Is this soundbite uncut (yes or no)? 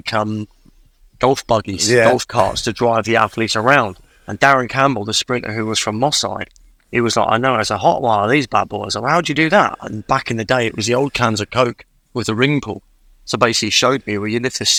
yes